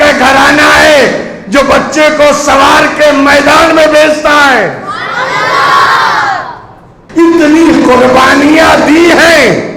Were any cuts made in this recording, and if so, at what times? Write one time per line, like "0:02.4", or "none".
0:06.9